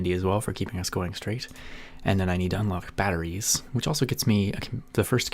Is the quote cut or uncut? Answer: cut